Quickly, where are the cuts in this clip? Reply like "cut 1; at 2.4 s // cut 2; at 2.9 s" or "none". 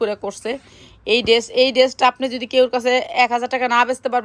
none